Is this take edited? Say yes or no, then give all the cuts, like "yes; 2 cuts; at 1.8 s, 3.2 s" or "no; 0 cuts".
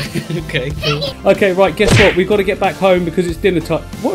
yes; 1 cut; at 1.2 s